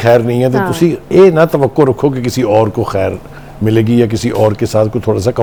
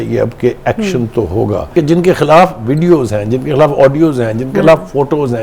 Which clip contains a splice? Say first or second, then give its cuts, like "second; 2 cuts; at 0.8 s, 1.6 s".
second; 1 cut; at 1.7 s